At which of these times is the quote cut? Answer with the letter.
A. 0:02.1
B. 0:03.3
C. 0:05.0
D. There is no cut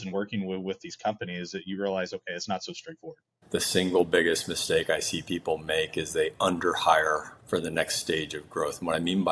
B